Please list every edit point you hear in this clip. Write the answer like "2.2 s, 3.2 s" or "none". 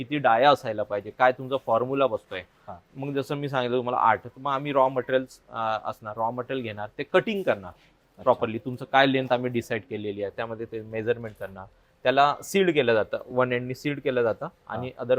none